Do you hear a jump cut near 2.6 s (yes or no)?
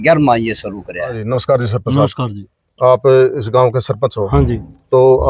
no